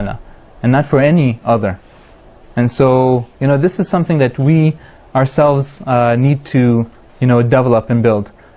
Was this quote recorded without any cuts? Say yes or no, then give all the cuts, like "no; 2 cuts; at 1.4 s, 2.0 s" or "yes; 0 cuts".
no; 1 cut; at 2.5 s